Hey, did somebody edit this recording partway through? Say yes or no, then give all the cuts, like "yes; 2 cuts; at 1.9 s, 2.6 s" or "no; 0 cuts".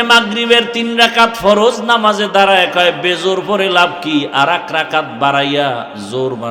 no; 0 cuts